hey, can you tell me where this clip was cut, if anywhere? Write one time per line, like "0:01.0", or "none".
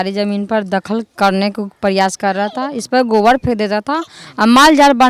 none